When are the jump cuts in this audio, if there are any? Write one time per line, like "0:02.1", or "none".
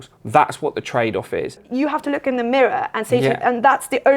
0:01.6

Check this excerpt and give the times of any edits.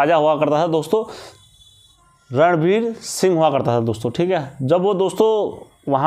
none

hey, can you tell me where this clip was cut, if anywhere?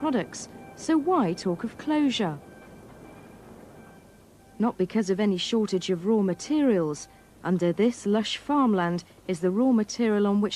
none

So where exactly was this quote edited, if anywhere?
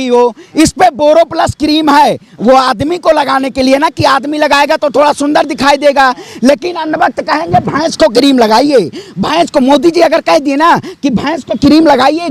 none

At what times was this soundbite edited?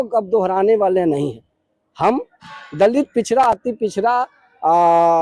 none

